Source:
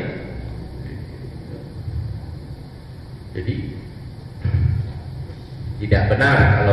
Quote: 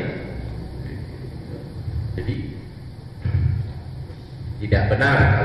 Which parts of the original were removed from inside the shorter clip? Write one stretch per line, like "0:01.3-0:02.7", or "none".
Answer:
0:02.2-0:03.4

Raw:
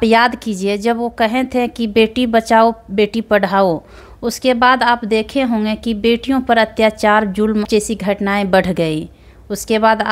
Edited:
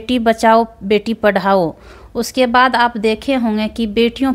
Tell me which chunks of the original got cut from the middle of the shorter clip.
none

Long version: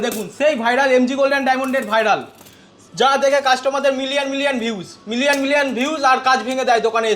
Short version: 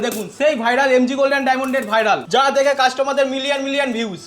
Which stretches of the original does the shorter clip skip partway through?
0:02.2-0:02.9

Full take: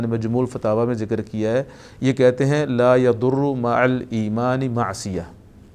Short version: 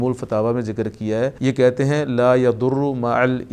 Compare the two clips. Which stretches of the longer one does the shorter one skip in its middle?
0:01.7-0:02.0

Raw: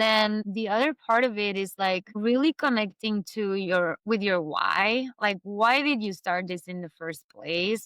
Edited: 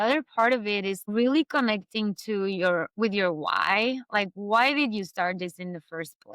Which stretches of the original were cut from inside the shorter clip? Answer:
0:01.7-0:02.1

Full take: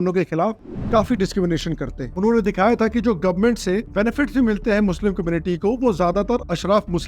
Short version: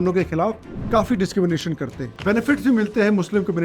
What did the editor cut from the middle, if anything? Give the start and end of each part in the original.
0:02.1-0:03.8

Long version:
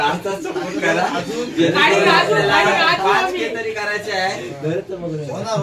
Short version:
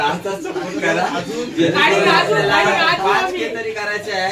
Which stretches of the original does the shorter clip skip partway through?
none

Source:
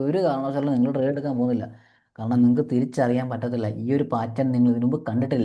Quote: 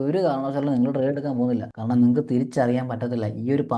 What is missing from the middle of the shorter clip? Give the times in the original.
0:01.7-0:02.1

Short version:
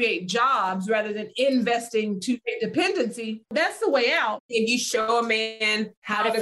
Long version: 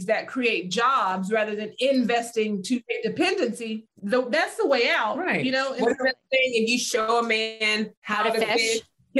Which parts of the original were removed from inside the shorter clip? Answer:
0:03.9-0:04.3
0:05.3-0:06.5

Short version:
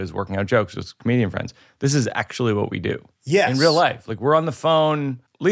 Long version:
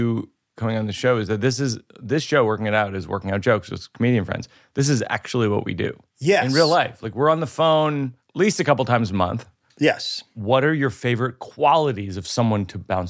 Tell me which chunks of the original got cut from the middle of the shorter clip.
none

